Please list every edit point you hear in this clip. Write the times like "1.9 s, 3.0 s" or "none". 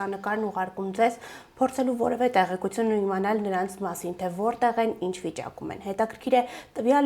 none